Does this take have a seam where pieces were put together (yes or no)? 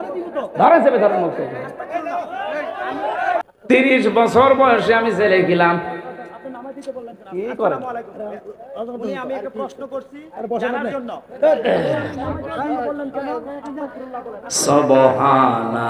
yes